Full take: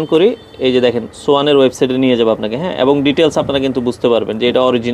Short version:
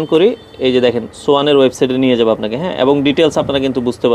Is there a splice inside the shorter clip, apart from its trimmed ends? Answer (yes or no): no